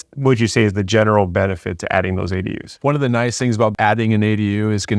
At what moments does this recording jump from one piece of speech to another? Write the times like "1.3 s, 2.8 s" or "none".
2.8 s